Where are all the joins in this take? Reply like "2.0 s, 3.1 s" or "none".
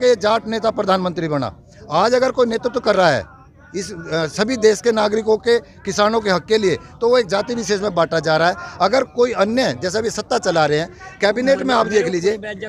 none